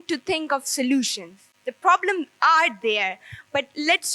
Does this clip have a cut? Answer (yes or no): no